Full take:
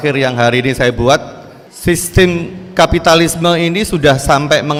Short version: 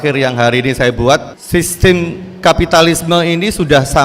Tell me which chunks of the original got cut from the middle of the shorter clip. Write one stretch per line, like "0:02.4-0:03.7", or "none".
0:01.4-0:01.7

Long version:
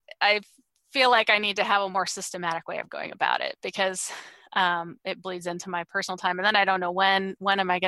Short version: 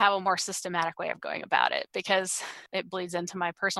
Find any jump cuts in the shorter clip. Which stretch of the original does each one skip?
0:04.3-0:04.9

